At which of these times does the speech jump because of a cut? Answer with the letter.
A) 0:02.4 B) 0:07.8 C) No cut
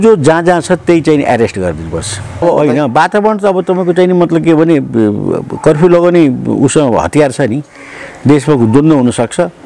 A